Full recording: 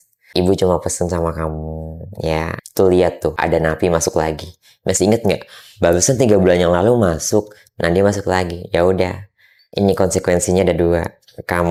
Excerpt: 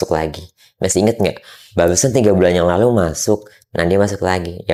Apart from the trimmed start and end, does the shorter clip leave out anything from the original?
no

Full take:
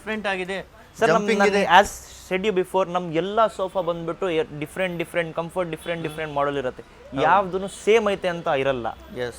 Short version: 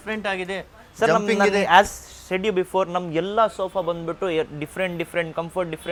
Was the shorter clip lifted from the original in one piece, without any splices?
yes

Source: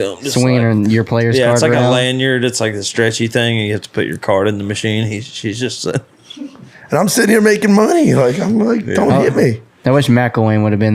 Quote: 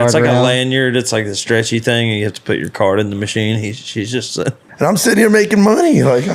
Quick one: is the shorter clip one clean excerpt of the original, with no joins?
no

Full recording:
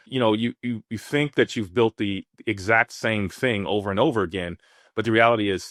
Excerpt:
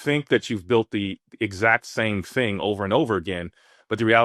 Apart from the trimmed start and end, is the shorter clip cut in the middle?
no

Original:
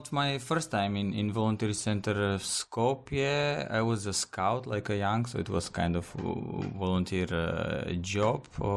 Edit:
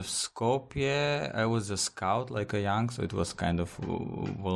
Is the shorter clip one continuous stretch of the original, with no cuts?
yes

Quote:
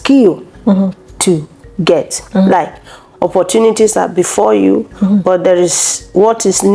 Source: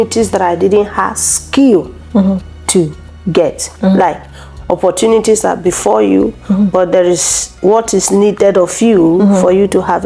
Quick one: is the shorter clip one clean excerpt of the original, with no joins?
yes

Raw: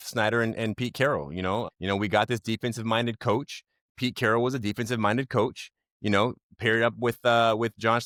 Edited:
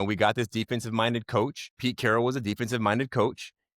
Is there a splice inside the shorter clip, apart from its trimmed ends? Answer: yes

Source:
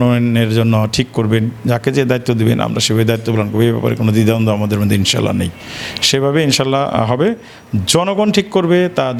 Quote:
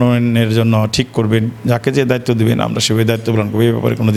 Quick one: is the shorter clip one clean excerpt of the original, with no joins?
yes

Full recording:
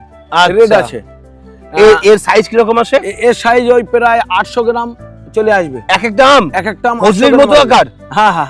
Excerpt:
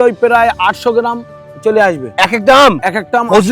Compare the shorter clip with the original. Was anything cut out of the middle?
no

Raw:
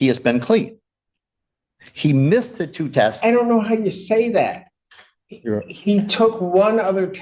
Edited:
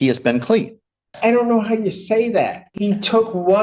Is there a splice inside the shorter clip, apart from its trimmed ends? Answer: yes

